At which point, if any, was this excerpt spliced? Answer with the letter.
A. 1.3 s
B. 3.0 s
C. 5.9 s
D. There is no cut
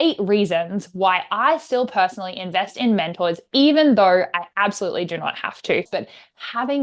C